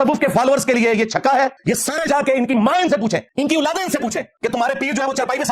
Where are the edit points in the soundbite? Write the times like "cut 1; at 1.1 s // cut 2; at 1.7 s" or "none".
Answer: cut 1; at 1.6 s // cut 2; at 3.3 s // cut 3; at 4.3 s